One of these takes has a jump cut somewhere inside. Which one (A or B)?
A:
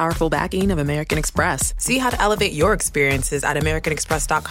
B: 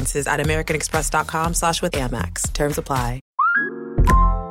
B